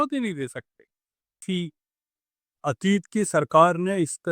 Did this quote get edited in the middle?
yes; 1 cut; at 1.4 s

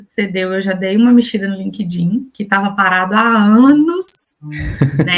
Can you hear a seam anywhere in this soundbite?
no; 0 cuts

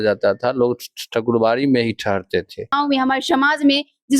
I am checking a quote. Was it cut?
yes; 1 cut; at 2.7 s

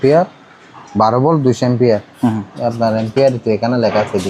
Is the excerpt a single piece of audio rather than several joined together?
yes; 0 cuts

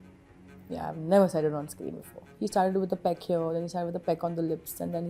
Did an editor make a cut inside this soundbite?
yes; 1 cut; at 2.3 s

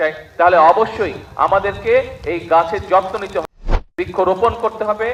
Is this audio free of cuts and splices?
yes; 0 cuts

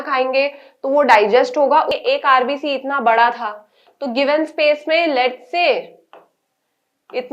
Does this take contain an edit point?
yes; 1 cut; at 2.0 s

